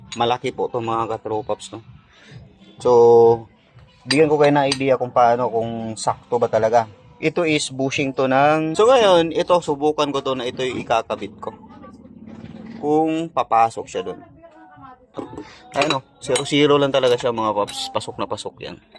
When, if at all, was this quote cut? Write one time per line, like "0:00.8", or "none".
0:08.7
0:15.0